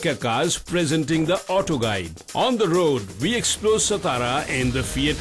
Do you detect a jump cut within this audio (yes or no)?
yes